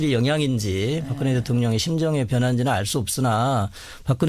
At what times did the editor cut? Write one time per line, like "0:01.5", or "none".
0:02.7